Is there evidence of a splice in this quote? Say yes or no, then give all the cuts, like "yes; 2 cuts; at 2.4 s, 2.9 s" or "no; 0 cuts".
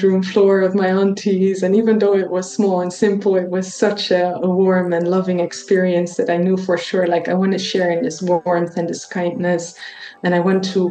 no; 0 cuts